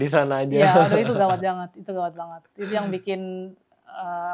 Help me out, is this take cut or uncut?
uncut